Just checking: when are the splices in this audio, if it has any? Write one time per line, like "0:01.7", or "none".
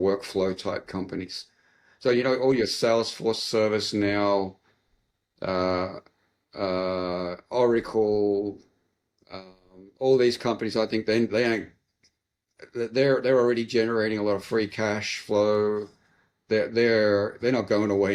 none